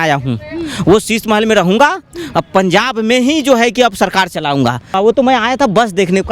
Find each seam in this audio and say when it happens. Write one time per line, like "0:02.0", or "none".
0:04.9

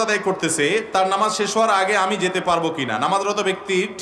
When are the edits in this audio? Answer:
none

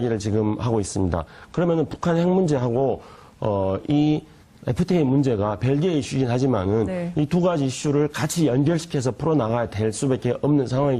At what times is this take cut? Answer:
0:04.1

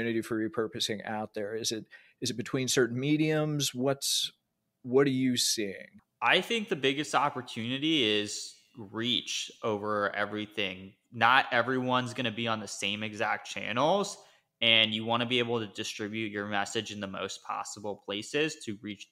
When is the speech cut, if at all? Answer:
0:05.8

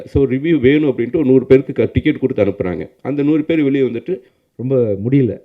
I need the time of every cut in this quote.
0:04.3

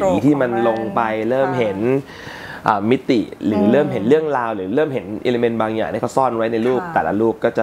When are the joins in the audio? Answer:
none

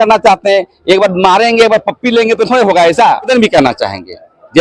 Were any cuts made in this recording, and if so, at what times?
0:03.3

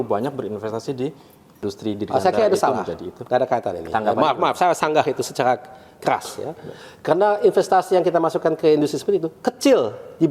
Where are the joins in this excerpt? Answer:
0:01.6

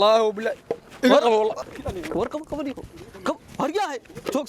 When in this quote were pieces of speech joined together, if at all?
0:01.6

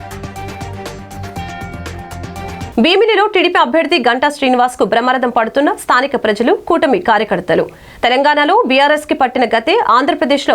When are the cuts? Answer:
0:02.7

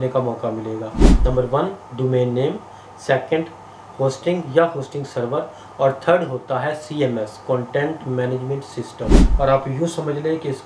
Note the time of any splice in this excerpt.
0:01.0
0:09.2

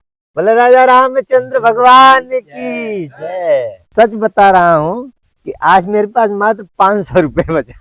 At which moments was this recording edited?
0:03.8

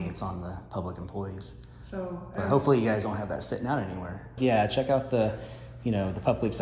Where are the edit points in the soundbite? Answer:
0:04.3

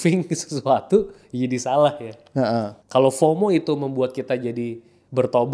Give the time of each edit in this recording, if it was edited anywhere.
0:02.8

